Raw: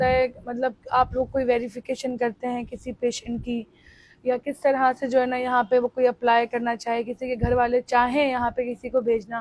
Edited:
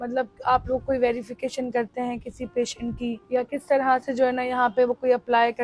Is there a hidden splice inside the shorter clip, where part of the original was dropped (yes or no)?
yes